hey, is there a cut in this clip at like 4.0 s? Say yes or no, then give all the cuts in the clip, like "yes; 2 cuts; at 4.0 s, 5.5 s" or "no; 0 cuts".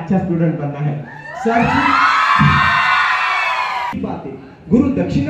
yes; 1 cut; at 4.0 s